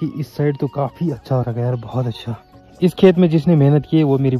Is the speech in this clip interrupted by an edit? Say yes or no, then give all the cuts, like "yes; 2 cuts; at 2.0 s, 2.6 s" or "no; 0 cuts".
no; 0 cuts